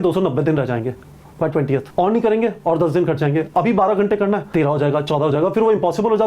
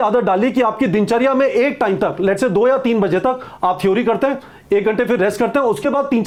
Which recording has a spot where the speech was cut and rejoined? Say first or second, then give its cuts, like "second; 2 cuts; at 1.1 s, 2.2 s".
first; 2 cuts; at 1.9 s, 4.5 s